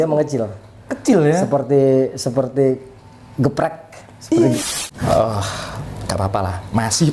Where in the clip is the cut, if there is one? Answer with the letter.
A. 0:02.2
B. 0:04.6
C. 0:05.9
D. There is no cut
B